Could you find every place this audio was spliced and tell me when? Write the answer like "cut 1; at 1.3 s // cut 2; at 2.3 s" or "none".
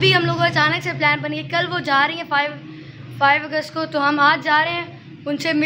none